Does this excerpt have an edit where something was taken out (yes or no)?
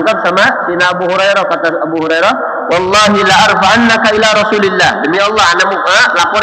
no